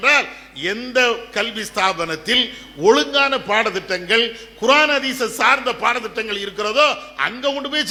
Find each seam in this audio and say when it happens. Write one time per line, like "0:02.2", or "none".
none